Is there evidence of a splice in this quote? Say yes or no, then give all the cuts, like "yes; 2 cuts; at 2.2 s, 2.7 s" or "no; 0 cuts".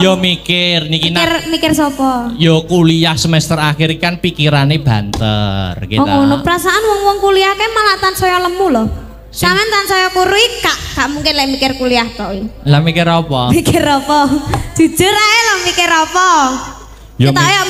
no; 0 cuts